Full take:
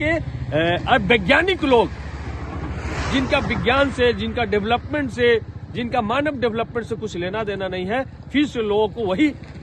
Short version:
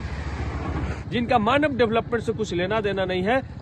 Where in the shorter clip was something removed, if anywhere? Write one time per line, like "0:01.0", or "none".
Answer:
0:01.0